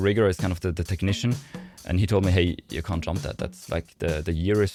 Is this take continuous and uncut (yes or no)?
yes